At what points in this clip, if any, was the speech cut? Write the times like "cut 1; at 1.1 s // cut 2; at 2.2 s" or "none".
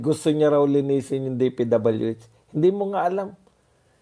none